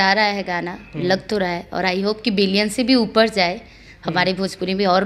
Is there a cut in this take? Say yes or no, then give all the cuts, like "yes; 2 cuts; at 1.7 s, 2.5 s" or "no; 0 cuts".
no; 0 cuts